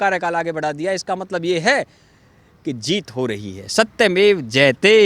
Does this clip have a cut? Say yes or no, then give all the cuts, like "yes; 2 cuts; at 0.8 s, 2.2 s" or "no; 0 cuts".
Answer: no; 0 cuts